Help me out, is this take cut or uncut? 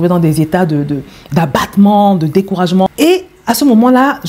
cut